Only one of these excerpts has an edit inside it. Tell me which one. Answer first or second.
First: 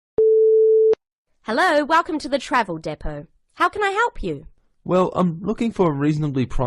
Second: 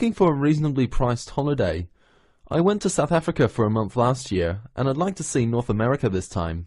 first